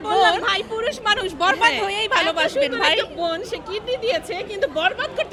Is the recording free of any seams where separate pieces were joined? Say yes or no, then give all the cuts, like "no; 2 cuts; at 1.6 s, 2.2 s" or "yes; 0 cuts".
yes; 0 cuts